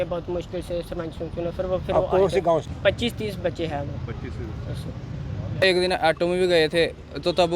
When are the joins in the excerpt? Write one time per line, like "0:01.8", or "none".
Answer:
0:02.7
0:05.6